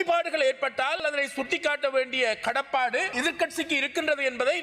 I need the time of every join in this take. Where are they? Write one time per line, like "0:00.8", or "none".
0:01.0
0:03.1